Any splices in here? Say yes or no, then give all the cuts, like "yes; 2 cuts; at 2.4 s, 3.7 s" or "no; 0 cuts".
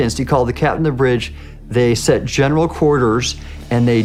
no; 0 cuts